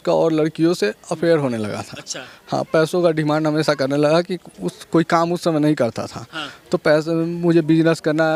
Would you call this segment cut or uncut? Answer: uncut